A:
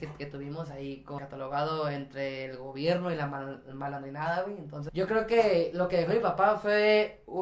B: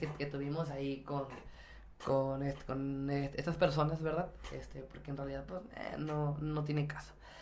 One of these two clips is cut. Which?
A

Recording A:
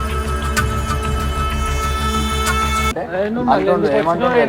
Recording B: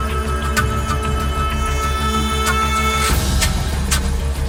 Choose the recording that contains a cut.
A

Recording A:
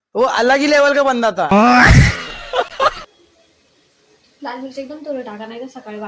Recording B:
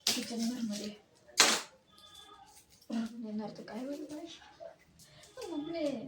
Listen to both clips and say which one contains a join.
A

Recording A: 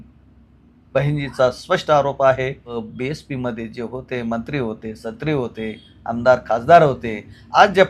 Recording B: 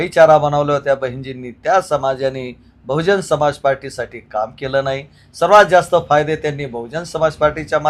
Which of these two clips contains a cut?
A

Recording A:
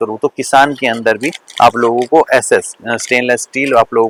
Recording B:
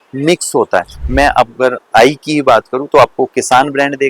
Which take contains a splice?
B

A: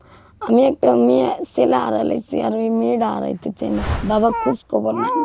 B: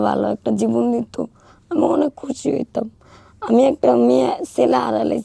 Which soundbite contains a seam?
A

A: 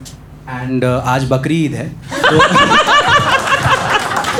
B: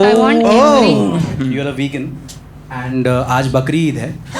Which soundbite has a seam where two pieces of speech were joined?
B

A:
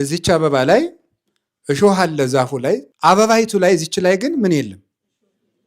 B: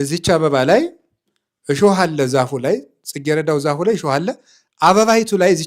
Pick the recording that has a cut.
A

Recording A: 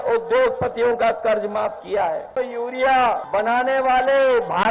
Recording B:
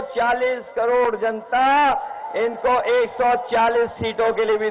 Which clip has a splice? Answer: A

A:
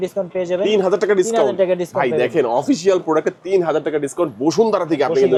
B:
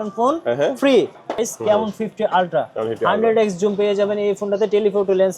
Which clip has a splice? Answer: B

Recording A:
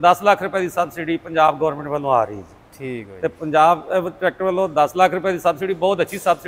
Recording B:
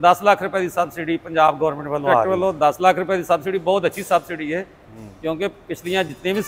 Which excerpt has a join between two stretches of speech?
B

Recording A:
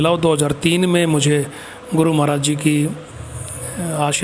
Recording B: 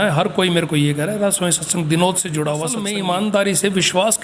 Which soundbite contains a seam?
B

